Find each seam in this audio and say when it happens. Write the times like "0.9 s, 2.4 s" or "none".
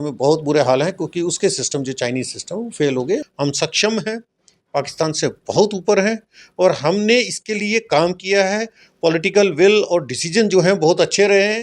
3.3 s

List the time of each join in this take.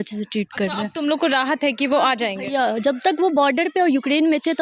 none

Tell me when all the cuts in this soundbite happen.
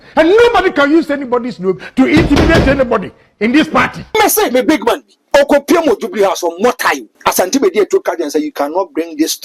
4.0 s, 5.1 s, 7.1 s

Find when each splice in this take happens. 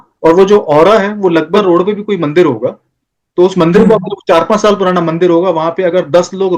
1.6 s

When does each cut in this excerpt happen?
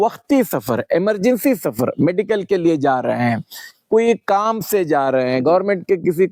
none

